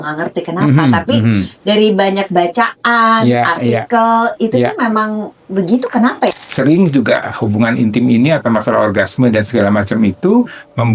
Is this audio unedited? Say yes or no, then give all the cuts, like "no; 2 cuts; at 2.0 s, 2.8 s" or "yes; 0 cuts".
no; 1 cut; at 6.3 s